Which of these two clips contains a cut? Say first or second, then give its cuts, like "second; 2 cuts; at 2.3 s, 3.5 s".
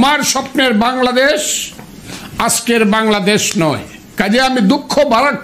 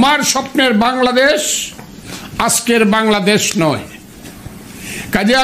first; 1 cut; at 4.0 s